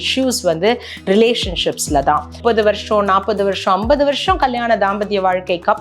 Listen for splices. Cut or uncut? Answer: cut